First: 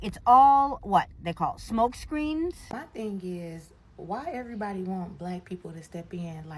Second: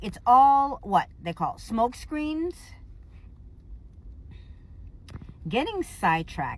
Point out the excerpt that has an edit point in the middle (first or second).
first